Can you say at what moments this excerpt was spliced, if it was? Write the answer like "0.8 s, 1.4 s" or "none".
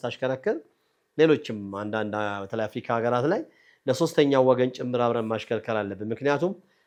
none

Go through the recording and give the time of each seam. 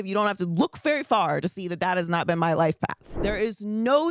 3.1 s

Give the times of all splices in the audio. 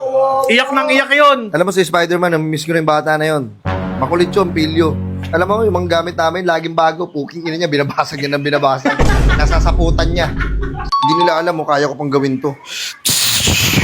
10.8 s

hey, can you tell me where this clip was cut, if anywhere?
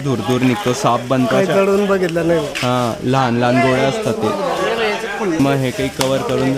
none

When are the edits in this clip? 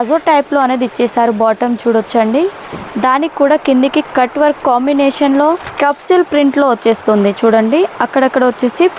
5.7 s

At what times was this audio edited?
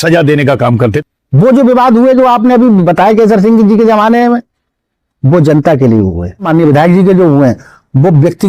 1.0 s, 6.5 s

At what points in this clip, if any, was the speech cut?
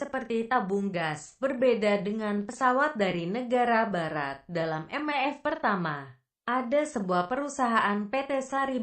4.7 s

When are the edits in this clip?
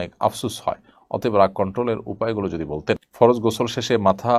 3.1 s

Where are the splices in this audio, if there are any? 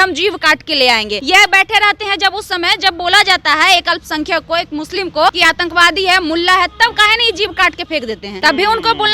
1.2 s, 5.4 s, 8.3 s

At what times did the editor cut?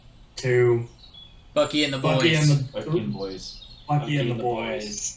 none

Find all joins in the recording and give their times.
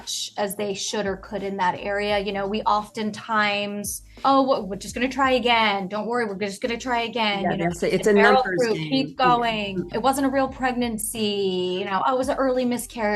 4.2 s, 9.9 s

